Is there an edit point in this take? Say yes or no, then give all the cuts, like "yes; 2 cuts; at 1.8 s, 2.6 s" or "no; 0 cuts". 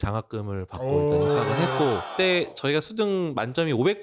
no; 0 cuts